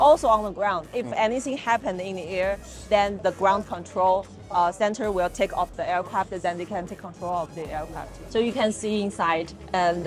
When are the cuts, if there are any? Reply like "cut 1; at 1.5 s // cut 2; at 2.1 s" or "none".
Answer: none